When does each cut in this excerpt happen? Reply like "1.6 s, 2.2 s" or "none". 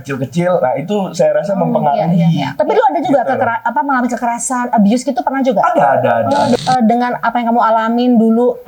6.6 s